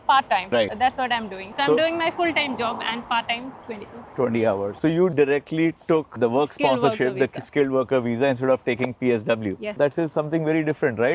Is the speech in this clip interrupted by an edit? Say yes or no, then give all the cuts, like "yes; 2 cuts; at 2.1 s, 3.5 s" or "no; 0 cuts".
yes; 1 cut; at 4.7 s